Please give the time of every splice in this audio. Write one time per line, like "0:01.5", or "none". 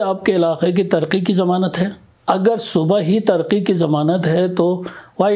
0:02.1